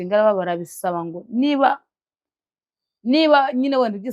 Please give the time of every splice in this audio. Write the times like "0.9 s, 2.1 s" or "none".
none